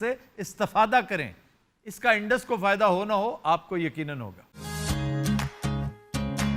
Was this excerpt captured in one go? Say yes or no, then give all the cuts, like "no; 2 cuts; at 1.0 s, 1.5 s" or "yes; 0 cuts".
no; 1 cut; at 4.5 s